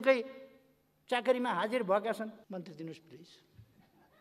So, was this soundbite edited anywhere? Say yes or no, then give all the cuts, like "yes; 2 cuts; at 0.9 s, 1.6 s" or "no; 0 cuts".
yes; 1 cut; at 2.4 s